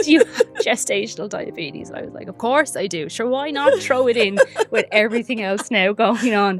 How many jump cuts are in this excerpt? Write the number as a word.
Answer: zero